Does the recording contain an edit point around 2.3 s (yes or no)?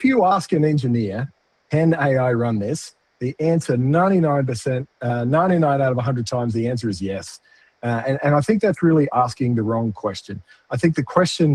no